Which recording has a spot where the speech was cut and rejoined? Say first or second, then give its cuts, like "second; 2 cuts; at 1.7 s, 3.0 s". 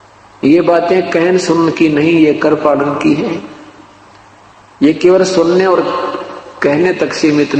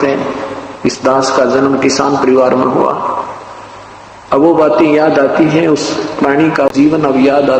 second; 1 cut; at 6.7 s